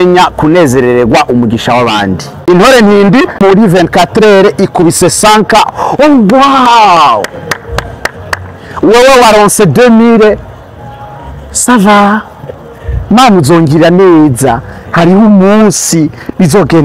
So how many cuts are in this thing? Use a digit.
2